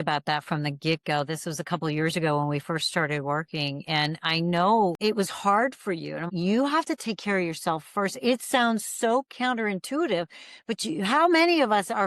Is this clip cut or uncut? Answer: cut